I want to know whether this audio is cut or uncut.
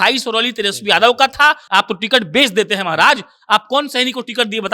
cut